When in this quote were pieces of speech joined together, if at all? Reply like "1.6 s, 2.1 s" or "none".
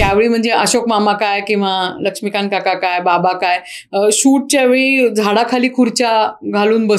none